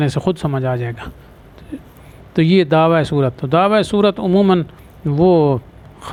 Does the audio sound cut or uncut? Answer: uncut